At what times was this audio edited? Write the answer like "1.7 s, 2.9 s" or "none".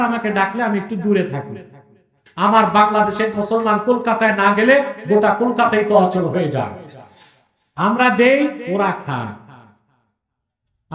2.2 s